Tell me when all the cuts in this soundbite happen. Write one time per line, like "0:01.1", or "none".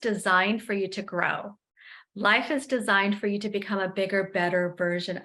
none